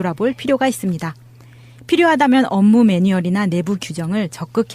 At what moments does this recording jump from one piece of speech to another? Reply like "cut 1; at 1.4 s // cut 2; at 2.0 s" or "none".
cut 1; at 3.0 s